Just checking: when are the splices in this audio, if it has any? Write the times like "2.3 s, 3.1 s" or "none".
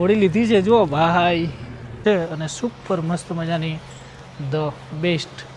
2.0 s